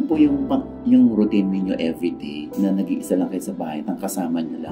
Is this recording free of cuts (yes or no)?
yes